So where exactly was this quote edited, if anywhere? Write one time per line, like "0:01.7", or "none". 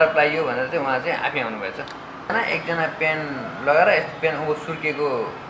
0:02.3